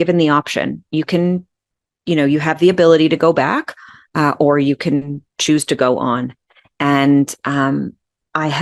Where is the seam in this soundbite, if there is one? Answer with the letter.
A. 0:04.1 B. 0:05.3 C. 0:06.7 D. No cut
D